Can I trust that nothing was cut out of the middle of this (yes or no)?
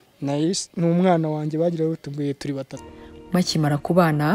no